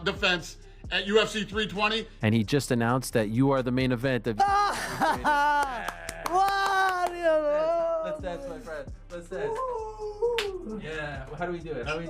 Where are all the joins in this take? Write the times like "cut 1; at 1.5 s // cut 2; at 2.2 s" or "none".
cut 1; at 2.1 s